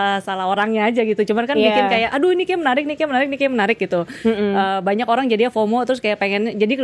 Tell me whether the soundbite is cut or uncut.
uncut